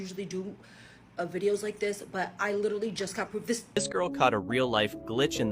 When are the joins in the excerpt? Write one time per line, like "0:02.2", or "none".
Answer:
0:03.8